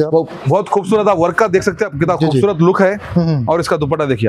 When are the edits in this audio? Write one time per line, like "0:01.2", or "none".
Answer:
none